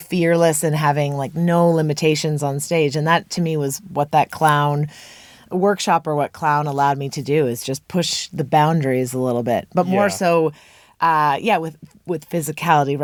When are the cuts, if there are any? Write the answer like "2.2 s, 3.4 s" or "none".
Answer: none